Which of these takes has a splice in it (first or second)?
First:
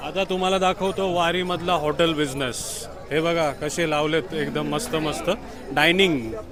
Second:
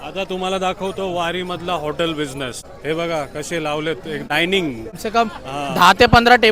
second